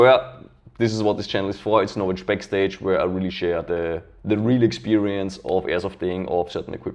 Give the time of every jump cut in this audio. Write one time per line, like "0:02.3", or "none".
none